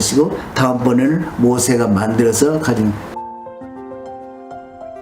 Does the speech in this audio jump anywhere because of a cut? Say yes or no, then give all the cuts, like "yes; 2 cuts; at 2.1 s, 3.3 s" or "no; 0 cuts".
yes; 1 cut; at 3.0 s